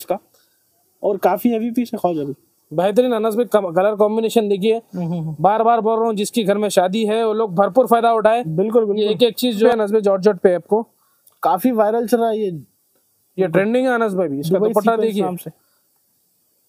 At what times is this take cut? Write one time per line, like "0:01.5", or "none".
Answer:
0:09.7

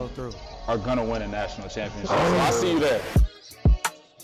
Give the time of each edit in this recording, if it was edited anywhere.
0:03.2

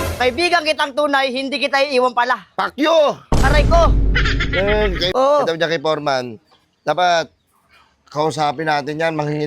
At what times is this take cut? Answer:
0:05.1

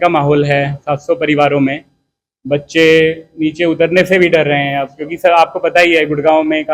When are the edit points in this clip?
none

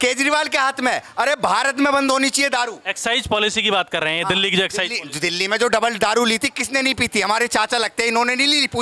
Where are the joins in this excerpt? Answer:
none

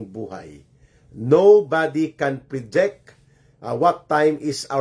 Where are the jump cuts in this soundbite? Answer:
none

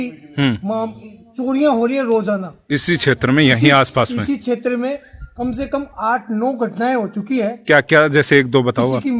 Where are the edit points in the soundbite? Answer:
none

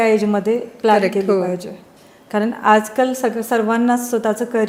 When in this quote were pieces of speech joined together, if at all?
none

